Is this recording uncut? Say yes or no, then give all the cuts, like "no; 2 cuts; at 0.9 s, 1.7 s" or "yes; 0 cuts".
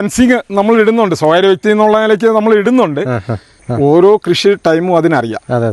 no; 1 cut; at 3.6 s